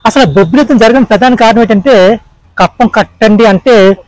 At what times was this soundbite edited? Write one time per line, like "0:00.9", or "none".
0:02.5